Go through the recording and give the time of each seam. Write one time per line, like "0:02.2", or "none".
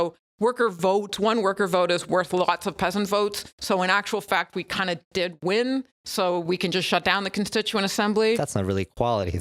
none